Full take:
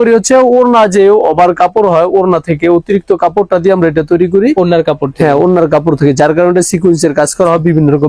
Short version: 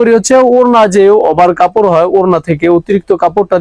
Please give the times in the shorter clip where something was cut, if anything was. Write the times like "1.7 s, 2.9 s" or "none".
none